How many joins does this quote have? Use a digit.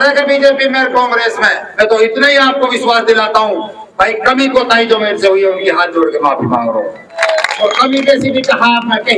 2